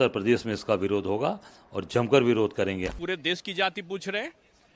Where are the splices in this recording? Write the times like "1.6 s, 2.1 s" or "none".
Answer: 2.9 s